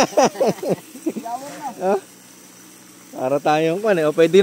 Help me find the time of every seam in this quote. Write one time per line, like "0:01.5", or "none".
none